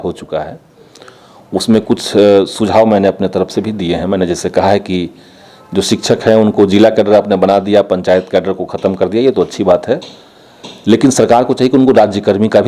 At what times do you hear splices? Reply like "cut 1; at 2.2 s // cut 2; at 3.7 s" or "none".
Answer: none